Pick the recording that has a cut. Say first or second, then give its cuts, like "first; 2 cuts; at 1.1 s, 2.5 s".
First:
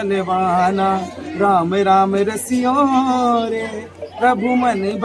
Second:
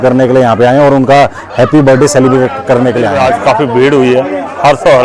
second; 1 cut; at 3.2 s